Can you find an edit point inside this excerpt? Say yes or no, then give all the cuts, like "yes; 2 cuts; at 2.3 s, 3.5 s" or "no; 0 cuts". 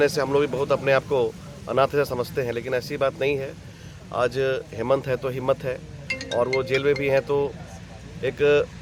no; 0 cuts